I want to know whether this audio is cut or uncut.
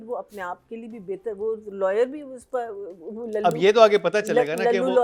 uncut